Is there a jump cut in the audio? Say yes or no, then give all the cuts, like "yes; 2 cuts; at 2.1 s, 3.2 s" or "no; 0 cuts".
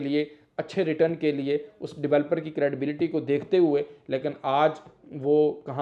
no; 0 cuts